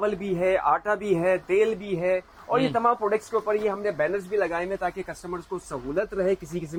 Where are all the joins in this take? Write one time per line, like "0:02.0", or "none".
none